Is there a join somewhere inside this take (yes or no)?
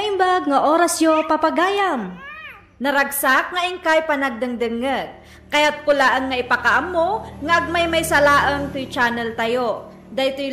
no